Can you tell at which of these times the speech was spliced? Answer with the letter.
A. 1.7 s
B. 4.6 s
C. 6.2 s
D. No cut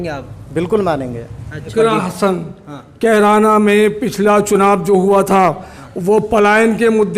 A